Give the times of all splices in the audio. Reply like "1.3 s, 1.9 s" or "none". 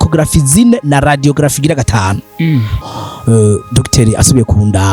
2.8 s